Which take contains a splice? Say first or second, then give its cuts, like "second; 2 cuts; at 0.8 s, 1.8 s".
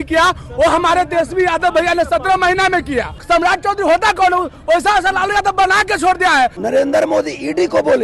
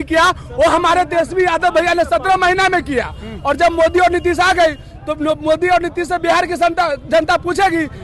first; 2 cuts; at 3.1 s, 6.6 s